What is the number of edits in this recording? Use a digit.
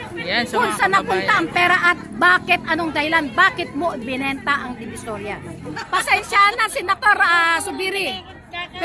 1